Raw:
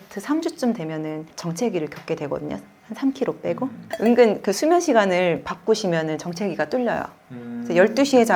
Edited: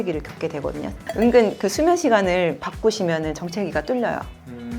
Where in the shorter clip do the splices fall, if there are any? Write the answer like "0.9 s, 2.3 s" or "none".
1.0 s

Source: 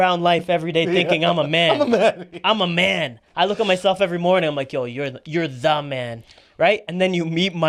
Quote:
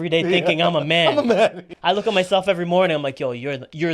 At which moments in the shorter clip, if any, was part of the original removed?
1.7 s

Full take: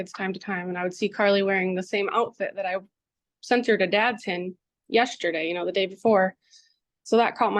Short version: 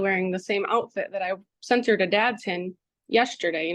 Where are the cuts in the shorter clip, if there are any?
1.5 s

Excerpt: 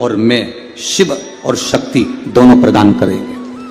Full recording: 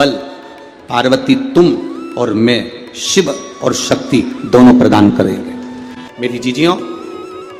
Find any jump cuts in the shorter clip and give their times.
none

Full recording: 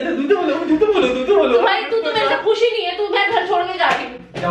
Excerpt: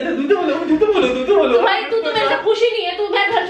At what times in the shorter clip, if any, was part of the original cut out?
none

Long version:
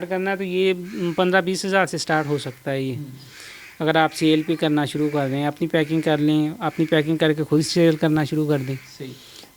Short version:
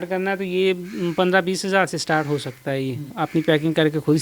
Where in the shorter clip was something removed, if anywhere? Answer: 3.2 s

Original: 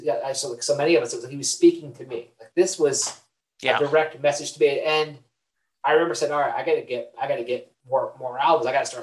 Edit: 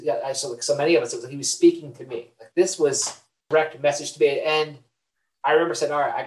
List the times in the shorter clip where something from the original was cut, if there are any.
3.5 s

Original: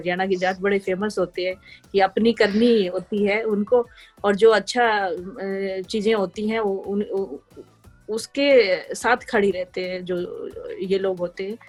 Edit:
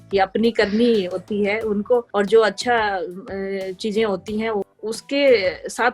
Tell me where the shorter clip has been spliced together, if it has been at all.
2.1 s, 4.7 s

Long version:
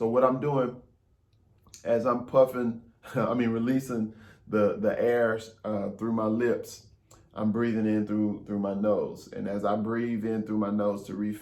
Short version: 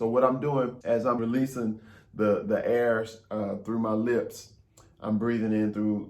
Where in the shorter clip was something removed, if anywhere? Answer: 1.2 s

